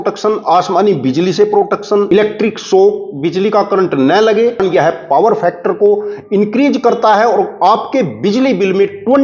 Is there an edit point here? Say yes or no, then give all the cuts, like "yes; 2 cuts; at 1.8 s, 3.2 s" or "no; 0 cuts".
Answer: yes; 2 cuts; at 2.1 s, 4.6 s